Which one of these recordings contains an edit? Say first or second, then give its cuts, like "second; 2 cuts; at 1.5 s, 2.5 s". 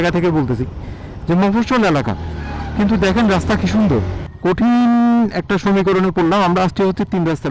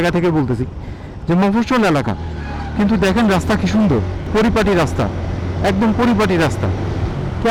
first; 1 cut; at 4.2 s